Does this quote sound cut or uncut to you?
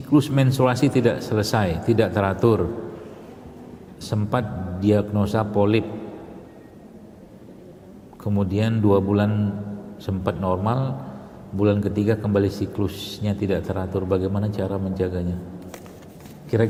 uncut